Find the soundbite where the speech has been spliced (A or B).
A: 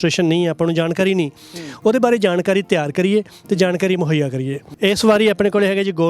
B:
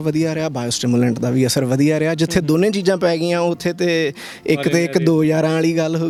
A